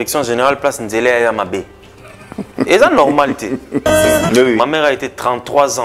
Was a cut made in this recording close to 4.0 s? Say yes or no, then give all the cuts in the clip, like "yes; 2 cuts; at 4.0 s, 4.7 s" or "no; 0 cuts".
yes; 1 cut; at 4.0 s